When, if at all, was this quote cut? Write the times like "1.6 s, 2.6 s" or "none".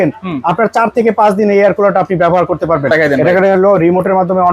2.9 s